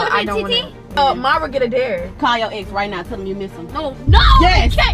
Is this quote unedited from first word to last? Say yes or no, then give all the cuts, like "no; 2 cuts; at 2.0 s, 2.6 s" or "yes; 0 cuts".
no; 1 cut; at 0.9 s